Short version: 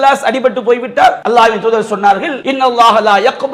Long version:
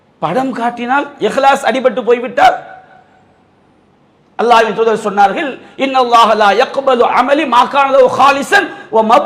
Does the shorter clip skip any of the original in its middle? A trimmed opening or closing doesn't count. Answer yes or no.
yes